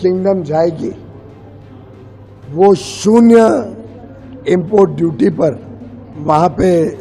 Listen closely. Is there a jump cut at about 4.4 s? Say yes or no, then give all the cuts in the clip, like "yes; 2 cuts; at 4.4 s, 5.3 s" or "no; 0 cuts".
no; 0 cuts